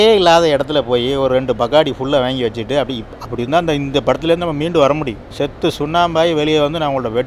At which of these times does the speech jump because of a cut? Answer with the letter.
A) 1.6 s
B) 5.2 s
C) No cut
B